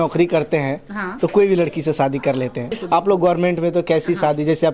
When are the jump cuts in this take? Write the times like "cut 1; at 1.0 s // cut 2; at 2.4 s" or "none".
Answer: cut 1; at 2.8 s